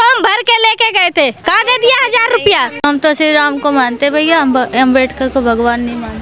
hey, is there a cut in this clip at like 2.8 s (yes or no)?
yes